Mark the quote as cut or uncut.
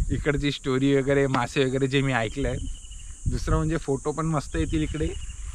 uncut